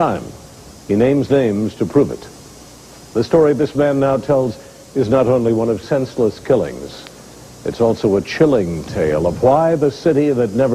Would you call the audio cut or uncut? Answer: cut